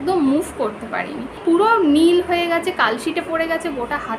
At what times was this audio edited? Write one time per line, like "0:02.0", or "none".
0:01.4